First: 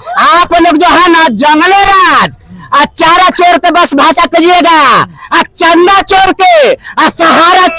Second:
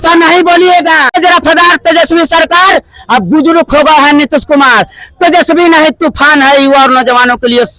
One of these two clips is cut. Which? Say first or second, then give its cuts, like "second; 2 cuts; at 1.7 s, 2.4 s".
second; 1 cut; at 1.2 s